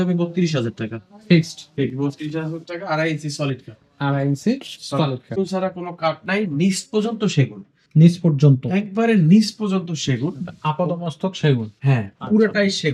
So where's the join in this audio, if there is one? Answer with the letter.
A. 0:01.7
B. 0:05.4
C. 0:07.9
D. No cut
B